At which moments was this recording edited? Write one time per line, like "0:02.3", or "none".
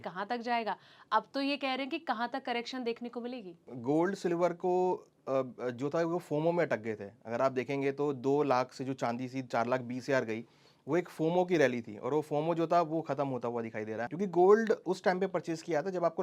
0:03.6
0:14.1